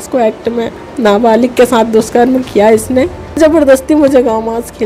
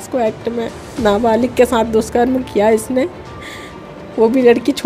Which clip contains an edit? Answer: first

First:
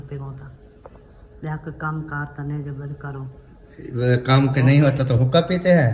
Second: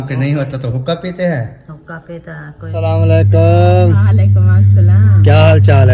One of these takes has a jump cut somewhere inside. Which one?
second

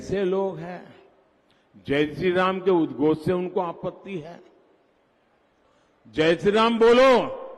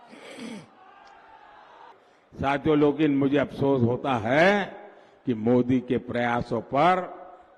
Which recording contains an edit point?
second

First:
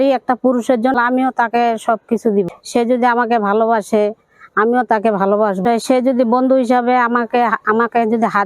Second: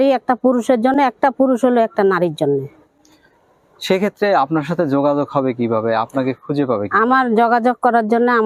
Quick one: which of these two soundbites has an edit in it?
first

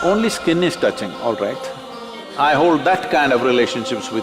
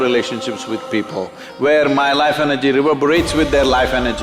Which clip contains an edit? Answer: first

